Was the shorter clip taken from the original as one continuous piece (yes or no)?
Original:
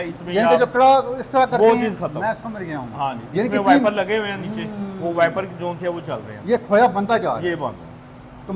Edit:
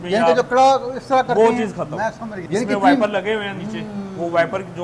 no